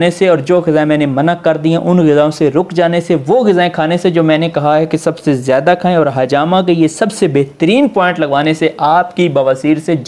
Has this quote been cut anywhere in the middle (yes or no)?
no